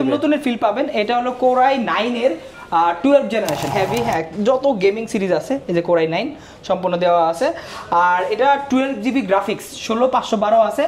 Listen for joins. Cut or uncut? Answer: cut